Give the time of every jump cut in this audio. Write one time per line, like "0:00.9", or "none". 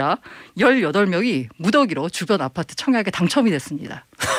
none